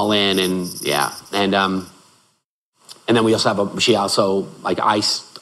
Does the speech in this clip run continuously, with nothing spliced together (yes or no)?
yes